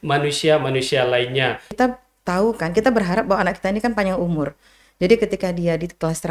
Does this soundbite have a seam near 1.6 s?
yes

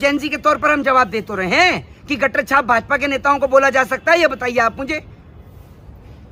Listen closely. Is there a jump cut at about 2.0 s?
no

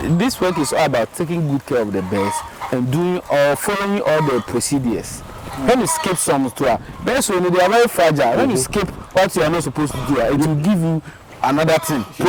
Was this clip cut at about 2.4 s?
no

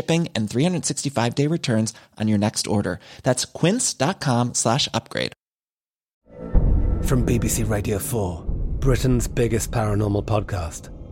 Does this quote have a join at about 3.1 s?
no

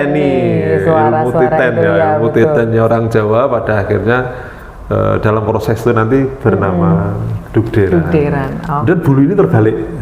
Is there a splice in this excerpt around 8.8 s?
yes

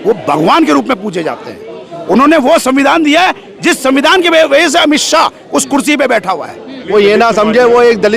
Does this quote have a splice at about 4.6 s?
no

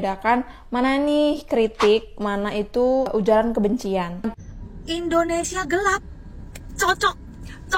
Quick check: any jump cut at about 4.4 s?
yes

